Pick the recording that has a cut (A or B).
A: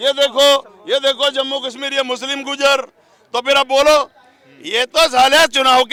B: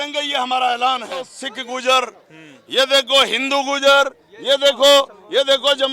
B